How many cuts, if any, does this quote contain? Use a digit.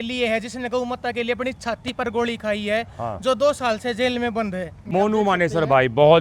1